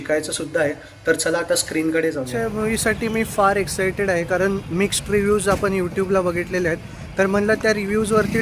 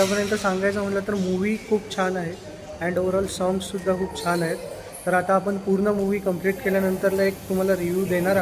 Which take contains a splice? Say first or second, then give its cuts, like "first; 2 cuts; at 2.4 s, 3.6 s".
first; 1 cut; at 2.3 s